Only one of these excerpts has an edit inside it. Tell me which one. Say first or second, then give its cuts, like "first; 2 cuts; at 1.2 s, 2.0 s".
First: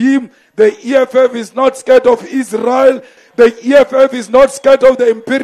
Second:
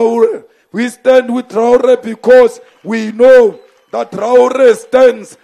first; 1 cut; at 3.2 s